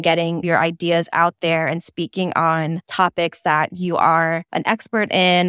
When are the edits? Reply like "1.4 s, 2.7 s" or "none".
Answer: 2.8 s, 4.5 s